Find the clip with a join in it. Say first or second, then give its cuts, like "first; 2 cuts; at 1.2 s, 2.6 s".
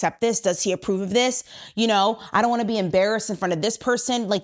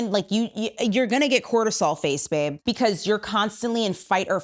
second; 1 cut; at 2.6 s